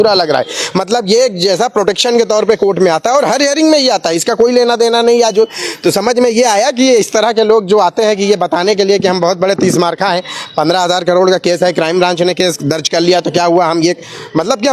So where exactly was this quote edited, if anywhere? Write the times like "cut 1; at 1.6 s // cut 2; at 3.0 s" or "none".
none